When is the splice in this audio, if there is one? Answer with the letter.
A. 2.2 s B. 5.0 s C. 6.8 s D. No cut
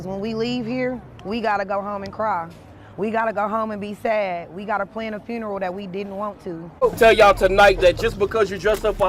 C